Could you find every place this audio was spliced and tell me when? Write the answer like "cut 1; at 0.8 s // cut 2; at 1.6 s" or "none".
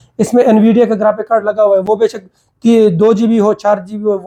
none